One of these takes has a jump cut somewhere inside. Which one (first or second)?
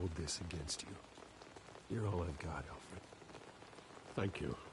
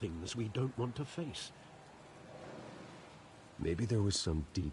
second